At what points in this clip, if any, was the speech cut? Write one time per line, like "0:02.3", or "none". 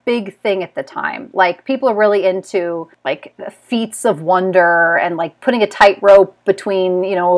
0:02.9